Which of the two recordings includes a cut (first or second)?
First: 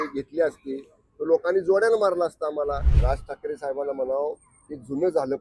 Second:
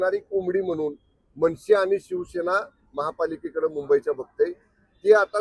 first